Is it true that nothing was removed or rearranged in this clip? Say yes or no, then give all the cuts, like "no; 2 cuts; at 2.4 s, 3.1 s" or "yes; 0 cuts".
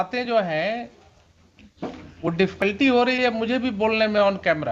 yes; 0 cuts